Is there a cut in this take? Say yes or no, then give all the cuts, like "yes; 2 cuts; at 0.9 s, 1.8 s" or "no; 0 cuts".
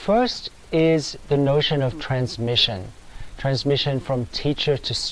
no; 0 cuts